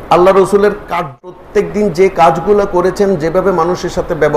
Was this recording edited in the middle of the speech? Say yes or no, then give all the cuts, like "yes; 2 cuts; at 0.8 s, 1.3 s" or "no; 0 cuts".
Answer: yes; 1 cut; at 0.9 s